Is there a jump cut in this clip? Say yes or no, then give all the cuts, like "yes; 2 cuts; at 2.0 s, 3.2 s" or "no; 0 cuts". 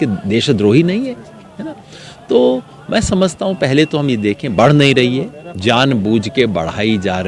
no; 0 cuts